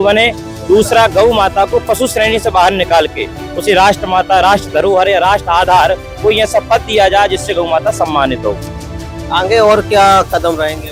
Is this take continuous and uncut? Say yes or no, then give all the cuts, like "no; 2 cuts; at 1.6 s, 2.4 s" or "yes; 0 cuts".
yes; 0 cuts